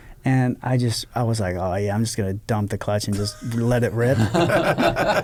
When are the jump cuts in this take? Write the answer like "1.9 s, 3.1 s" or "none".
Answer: none